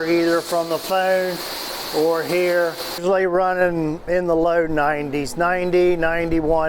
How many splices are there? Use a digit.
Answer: 1